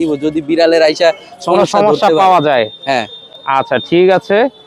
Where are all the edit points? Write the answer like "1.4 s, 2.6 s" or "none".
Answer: none